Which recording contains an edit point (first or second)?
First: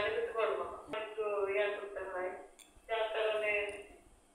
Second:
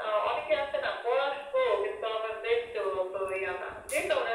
first